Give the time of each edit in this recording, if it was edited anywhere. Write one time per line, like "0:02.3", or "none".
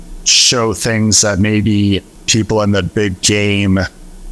0:02.2

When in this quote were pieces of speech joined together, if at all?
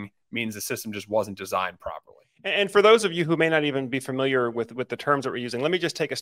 0:02.6

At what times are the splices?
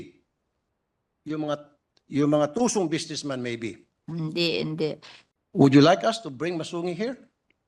0:05.1

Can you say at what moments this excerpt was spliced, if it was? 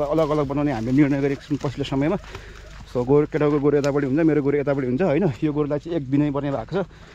none

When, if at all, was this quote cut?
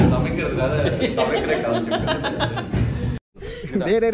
0:03.2

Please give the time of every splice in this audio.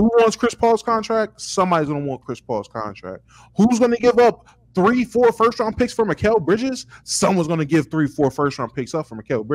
none

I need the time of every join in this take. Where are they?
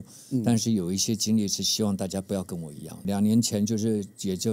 0:03.0

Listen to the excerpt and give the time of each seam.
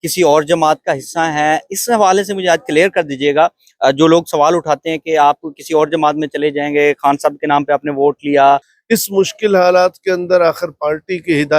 0:08.7

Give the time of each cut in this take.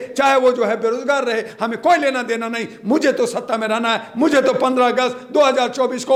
none

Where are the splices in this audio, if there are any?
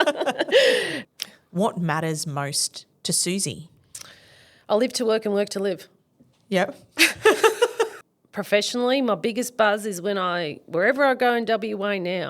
0:01.0
0:08.0

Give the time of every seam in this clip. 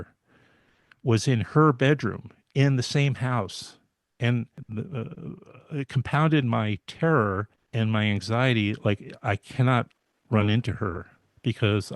0:04.6
0:07.6

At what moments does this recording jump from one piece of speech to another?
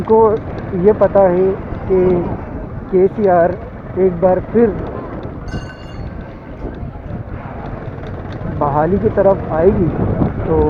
none

